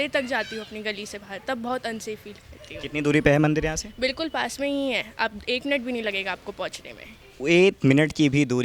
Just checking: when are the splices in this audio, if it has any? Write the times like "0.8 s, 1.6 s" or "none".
none